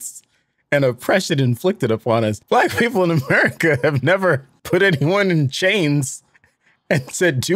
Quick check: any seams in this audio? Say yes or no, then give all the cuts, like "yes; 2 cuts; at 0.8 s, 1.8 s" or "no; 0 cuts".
yes; 2 cuts; at 2.4 s, 4.5 s